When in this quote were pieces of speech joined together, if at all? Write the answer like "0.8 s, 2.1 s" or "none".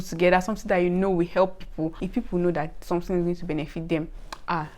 2.0 s